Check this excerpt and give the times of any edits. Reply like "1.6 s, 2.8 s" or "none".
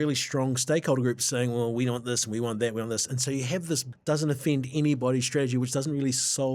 3.9 s